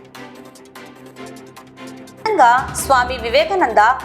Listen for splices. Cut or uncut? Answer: cut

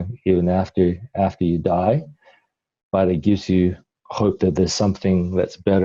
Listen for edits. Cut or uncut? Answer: uncut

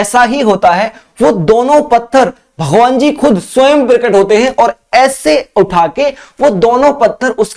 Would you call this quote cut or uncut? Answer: uncut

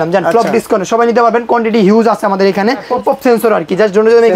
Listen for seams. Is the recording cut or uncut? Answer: cut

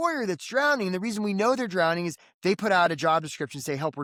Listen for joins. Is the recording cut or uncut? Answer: uncut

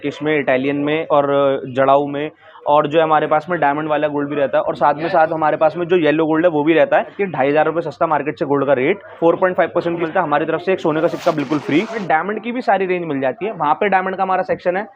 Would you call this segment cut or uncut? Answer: cut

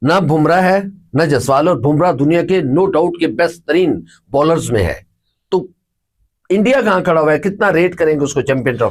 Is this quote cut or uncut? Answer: uncut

